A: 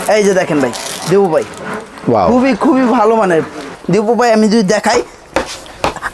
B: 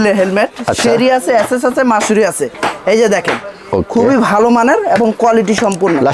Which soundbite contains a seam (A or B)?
A